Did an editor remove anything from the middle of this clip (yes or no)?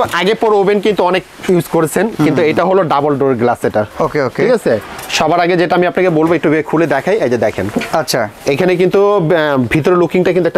no